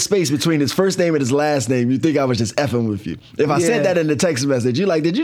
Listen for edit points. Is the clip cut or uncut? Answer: uncut